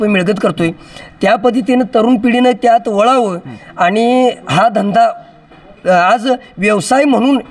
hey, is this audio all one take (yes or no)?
yes